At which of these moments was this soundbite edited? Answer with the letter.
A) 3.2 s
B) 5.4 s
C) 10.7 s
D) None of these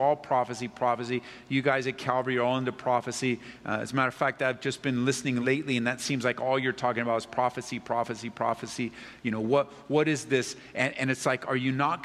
B